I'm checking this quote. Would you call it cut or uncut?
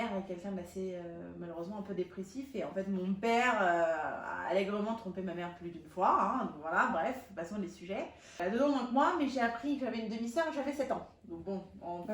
cut